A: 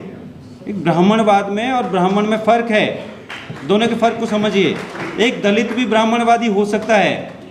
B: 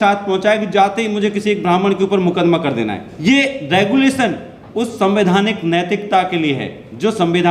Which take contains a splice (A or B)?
B